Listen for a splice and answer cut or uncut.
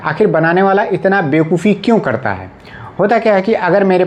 uncut